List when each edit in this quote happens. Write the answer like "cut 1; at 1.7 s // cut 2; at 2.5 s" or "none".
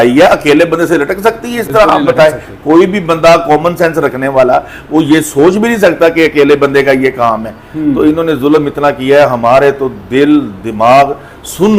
none

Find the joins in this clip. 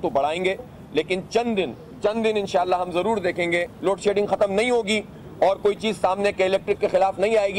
cut 1; at 1.9 s // cut 2; at 3.7 s

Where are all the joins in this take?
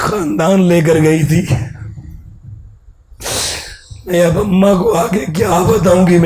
none

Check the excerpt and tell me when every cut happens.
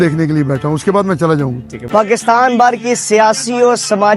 cut 1; at 1.7 s

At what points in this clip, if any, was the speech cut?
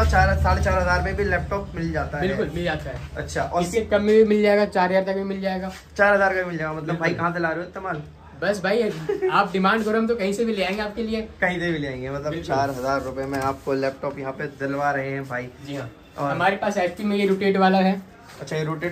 none

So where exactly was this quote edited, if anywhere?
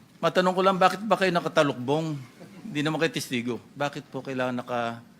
cut 1; at 3.7 s

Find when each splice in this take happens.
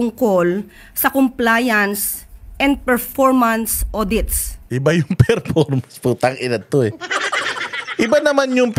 none

